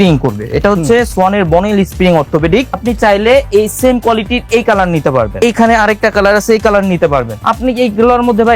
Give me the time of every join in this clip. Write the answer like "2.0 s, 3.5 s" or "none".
2.8 s, 5.3 s